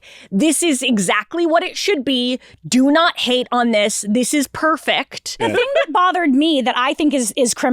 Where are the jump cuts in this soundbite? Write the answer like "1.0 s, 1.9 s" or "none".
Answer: 5.4 s